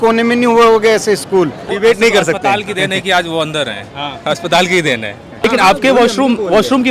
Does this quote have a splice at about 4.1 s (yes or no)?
no